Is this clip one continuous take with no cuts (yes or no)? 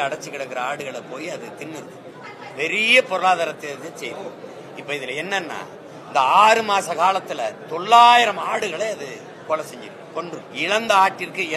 no